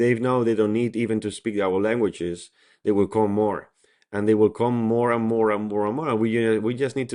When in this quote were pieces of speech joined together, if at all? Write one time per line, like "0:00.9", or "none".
none

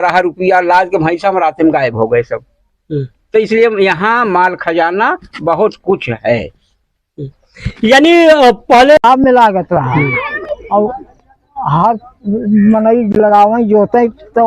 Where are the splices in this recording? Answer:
0:09.0

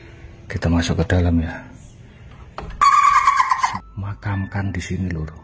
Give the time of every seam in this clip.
0:03.8

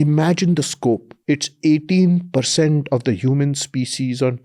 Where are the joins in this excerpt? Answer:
0:01.1

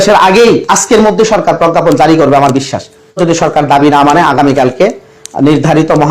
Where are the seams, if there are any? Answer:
0:03.2

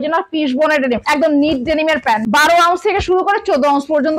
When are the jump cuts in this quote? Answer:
0:01.0
0:02.2

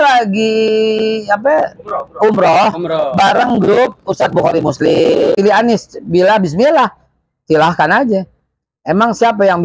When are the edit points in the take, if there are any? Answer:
0:05.4

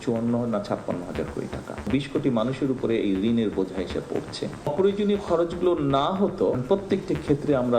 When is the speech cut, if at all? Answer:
0:01.9
0:04.7
0:06.6

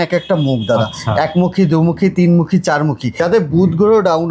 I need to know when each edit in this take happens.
0:03.1

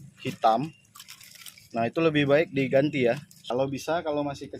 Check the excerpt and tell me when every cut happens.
0:03.3

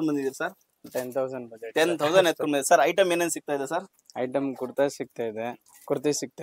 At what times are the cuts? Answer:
none

